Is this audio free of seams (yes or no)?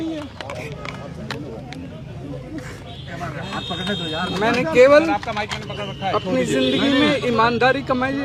yes